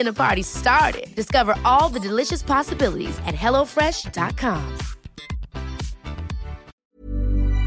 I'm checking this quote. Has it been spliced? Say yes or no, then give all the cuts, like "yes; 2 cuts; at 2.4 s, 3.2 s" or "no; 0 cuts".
yes; 1 cut; at 6.7 s